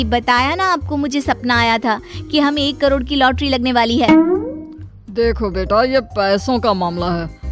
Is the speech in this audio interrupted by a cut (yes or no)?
no